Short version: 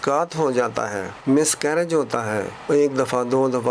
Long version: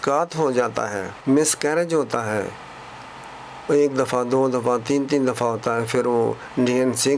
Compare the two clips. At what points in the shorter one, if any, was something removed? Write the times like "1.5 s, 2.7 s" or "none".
2.5 s